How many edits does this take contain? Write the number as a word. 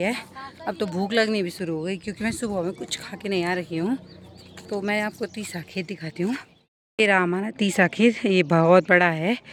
zero